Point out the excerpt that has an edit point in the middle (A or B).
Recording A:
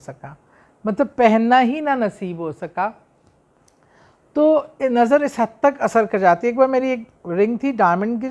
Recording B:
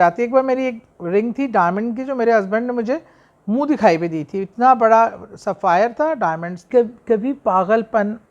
B